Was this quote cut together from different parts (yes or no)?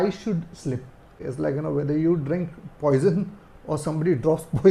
no